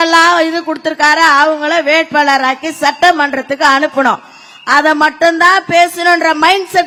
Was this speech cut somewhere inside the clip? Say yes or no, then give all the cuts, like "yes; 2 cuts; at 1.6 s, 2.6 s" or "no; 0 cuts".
no; 0 cuts